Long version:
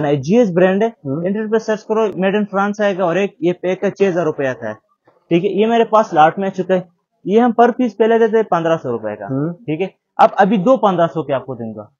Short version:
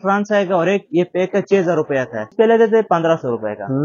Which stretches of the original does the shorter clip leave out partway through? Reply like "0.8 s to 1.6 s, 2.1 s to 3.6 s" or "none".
4.8 s to 7.9 s